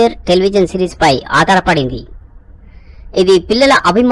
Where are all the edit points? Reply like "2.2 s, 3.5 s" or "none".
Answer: none